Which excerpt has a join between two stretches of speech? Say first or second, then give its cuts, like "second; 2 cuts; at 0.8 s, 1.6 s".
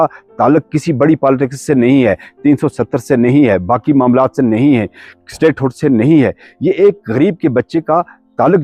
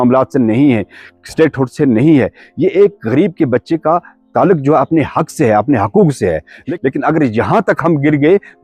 second; 1 cut; at 6.7 s